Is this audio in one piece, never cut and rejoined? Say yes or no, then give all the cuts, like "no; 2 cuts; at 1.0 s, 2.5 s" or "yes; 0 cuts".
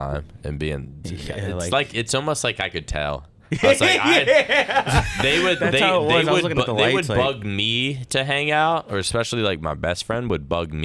yes; 0 cuts